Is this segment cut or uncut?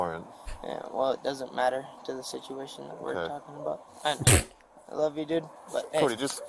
uncut